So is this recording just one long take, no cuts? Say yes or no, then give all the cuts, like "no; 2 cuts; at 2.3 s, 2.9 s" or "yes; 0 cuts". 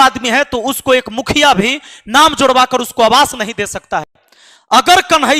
no; 1 cut; at 4.2 s